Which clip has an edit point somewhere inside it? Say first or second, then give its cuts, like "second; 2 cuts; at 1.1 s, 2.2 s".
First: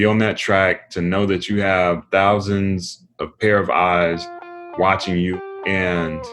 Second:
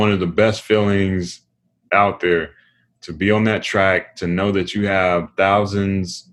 first; 1 cut; at 5.4 s